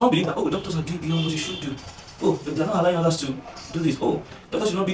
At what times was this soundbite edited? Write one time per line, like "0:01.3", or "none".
none